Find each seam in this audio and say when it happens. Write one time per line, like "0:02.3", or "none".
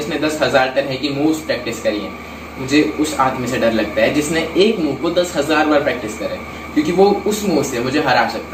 none